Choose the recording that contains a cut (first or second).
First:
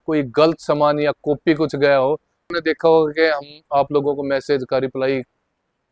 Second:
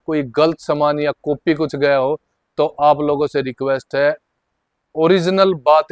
first